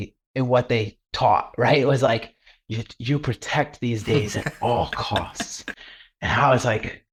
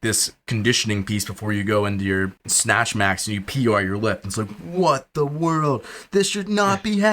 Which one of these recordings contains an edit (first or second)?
second